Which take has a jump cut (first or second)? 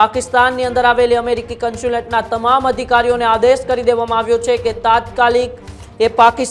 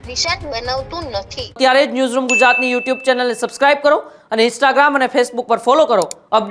second